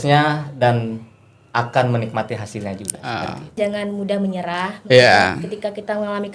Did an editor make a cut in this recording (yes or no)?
yes